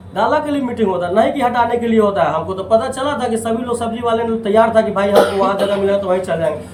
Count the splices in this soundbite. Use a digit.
0